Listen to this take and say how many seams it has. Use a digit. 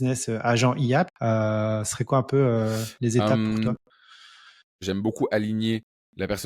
2